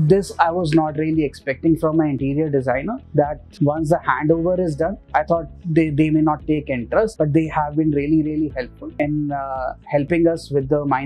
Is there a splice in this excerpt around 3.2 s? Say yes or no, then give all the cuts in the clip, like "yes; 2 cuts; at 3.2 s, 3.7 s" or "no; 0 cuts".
yes; 4 cuts; at 3.2 s, 5.0 s, 7.1 s, 8.8 s